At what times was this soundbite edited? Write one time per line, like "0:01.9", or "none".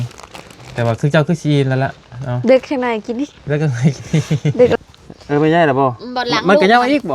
0:04.7